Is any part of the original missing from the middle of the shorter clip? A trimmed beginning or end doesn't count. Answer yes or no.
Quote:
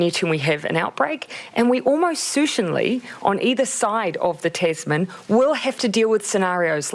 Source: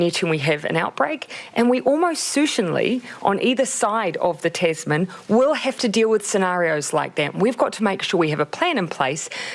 no